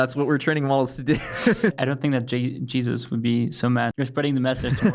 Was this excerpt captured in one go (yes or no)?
no